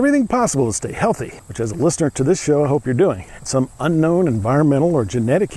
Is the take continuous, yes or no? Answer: no